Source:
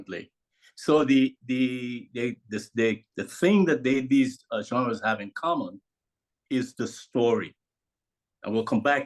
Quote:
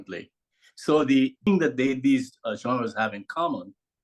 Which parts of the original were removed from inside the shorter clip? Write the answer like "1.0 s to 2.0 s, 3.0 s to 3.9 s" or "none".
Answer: 1.5 s to 3.5 s